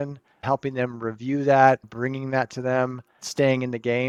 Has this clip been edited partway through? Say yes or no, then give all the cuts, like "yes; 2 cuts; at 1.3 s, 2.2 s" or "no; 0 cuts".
no; 0 cuts